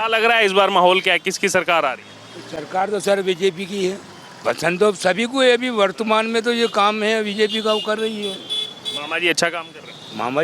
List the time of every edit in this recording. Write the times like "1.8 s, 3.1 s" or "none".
4.3 s